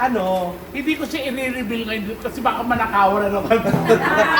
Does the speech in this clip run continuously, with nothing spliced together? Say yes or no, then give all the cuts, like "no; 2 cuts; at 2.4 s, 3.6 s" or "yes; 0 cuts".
yes; 0 cuts